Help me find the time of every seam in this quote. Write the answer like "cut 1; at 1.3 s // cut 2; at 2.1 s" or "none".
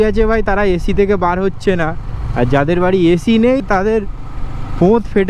cut 1; at 3.6 s